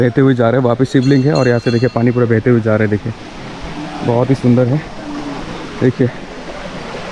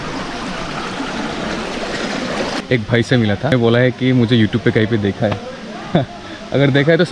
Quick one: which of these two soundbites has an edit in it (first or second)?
second